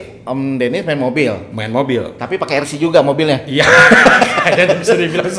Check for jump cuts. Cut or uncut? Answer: uncut